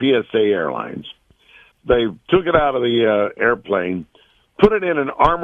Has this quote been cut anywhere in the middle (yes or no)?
yes